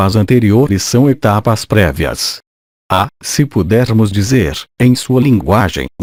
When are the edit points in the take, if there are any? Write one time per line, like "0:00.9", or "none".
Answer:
none